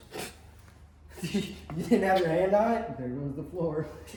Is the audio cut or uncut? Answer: uncut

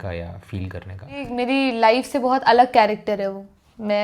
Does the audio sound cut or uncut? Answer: cut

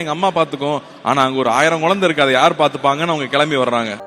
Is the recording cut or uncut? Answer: uncut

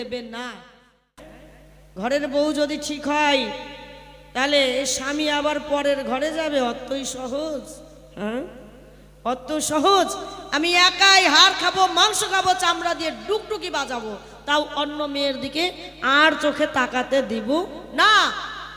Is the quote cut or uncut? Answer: cut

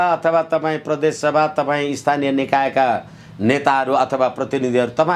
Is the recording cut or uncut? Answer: uncut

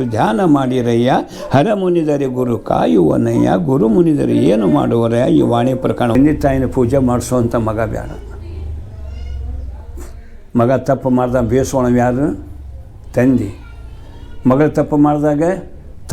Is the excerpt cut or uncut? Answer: cut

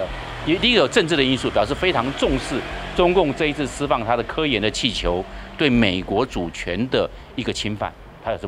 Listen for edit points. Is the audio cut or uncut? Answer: uncut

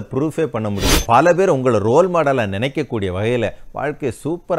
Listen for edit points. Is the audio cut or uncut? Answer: cut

